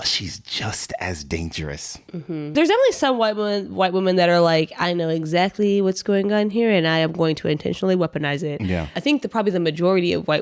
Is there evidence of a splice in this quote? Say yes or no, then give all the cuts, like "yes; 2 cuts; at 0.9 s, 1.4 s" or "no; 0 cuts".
yes; 2 cuts; at 2.5 s, 8.9 s